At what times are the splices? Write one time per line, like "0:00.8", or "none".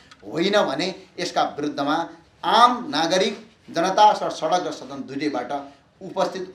none

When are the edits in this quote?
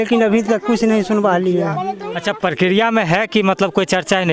none

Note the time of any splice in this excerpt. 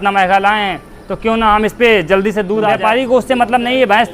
0:02.7

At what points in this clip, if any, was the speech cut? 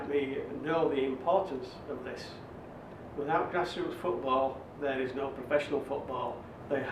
none

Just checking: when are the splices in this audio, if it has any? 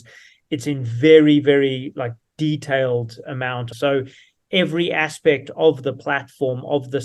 0:03.6

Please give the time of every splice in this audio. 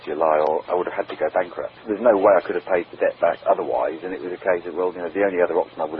none

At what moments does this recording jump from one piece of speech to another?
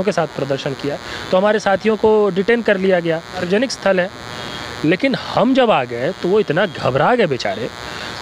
0:03.4

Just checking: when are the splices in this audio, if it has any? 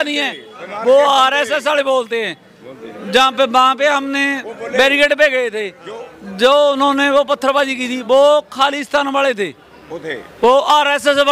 none

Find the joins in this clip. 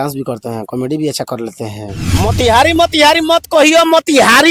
0:02.1

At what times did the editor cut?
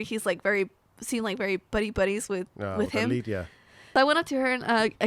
0:03.8

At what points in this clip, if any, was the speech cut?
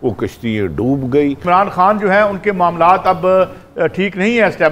0:01.4

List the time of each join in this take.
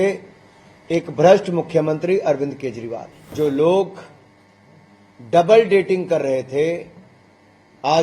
0:03.3

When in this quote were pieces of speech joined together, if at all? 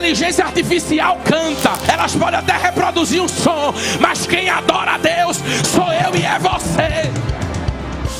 0:01.8

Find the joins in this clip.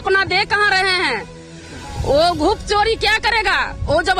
none

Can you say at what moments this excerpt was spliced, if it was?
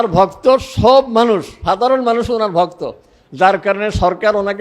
none

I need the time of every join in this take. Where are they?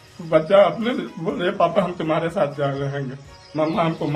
none

